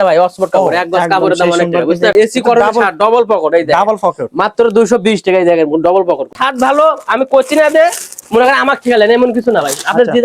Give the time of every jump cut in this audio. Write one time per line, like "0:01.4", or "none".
0:02.2
0:06.3